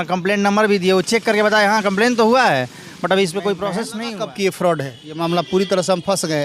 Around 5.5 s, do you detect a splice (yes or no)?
no